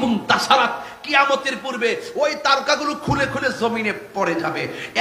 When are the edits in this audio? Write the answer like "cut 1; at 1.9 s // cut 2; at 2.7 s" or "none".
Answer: none